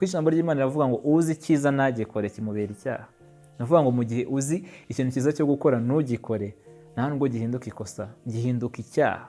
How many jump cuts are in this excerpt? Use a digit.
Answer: 0